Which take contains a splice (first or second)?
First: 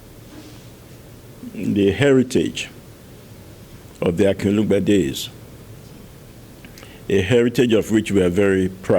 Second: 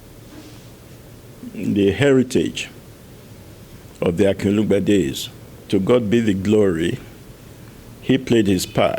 second